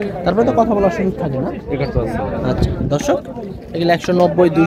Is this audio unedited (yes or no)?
yes